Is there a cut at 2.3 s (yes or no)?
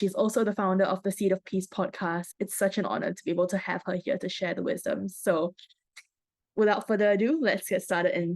yes